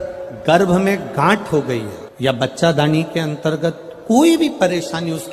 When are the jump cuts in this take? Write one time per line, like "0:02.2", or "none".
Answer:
none